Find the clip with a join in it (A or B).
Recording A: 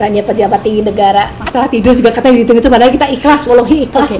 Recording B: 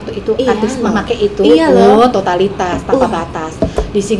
A